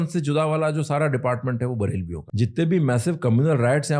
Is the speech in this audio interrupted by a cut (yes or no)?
yes